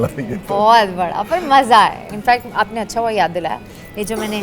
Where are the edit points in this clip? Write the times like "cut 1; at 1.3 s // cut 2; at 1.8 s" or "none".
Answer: cut 1; at 2.1 s